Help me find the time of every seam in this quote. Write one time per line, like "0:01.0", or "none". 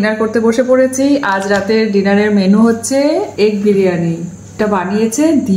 0:03.3
0:04.6